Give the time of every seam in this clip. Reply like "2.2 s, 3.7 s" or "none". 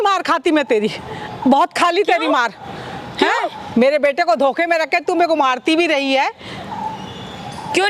none